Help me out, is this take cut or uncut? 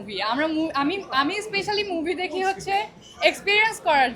uncut